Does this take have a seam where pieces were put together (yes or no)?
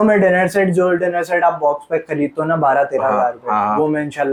no